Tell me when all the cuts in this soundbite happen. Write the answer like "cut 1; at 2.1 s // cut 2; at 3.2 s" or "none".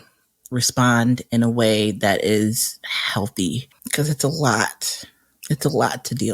cut 1; at 3.6 s